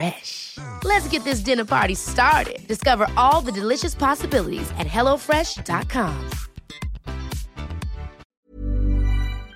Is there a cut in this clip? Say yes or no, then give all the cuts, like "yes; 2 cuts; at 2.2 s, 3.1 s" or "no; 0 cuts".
yes; 1 cut; at 8.2 s